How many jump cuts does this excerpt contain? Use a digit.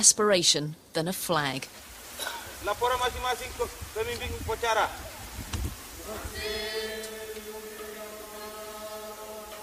0